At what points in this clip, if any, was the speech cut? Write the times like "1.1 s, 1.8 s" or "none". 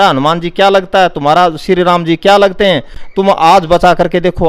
none